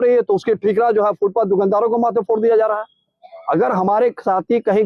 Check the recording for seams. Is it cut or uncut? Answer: uncut